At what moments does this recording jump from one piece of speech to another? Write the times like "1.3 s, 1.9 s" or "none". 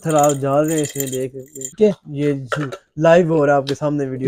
1.7 s